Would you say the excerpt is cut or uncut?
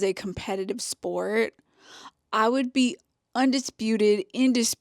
cut